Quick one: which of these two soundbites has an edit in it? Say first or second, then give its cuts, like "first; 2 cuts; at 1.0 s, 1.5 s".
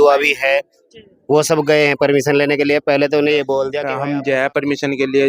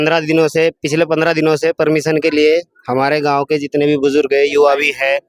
first; 1 cut; at 3.8 s